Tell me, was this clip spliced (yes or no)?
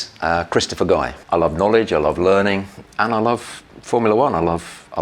yes